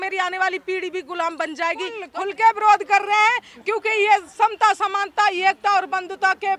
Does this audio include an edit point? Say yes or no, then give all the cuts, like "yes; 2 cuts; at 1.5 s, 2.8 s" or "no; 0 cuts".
yes; 1 cut; at 2.0 s